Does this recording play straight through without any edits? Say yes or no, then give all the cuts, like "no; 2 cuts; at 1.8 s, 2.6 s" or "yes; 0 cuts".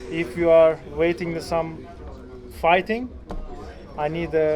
yes; 0 cuts